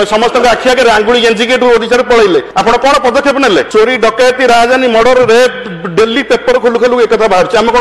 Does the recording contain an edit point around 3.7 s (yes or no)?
yes